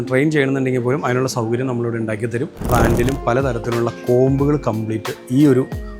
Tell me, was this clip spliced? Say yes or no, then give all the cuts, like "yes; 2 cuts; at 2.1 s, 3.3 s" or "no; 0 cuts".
yes; 1 cut; at 2.7 s